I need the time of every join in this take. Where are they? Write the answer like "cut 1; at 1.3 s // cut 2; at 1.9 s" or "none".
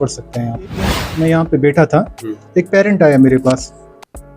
cut 1; at 1.0 s